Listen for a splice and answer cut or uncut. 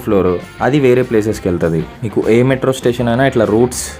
uncut